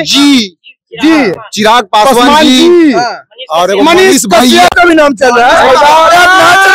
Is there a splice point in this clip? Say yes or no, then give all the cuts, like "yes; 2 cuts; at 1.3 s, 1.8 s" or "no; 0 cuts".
no; 0 cuts